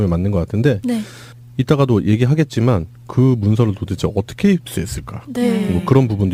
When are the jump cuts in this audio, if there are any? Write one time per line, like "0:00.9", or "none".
none

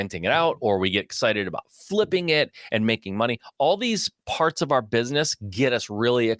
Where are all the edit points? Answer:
none

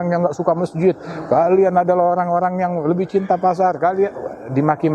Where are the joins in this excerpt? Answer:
none

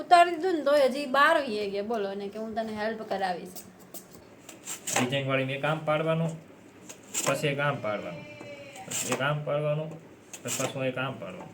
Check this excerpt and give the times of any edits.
0:04.2

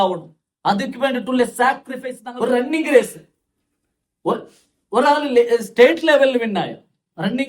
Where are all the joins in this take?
0:02.2

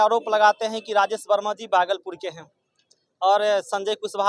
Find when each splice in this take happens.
none

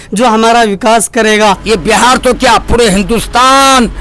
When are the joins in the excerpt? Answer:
0:01.6

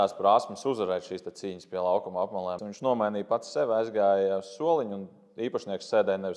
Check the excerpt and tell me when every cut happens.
0:02.7

